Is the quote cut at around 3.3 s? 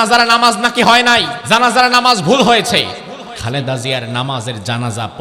yes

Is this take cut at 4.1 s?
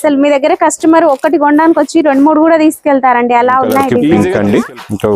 yes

